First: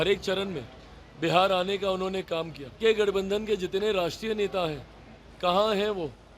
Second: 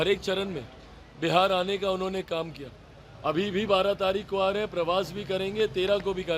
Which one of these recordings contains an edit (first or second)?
first